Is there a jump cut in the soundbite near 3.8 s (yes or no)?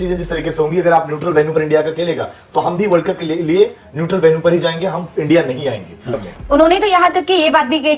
no